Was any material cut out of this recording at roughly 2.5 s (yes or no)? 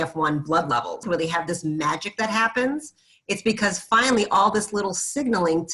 no